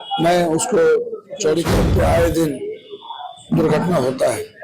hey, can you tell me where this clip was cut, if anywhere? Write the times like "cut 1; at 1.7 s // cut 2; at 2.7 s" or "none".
cut 1; at 1.7 s